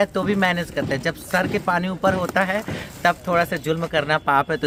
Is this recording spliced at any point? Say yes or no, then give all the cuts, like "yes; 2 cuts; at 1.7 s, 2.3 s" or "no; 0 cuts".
no; 0 cuts